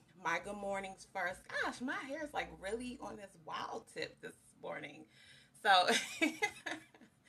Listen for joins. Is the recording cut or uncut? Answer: uncut